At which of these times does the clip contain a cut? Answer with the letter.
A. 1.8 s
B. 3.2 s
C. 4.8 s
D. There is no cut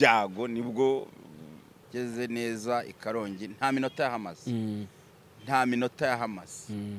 A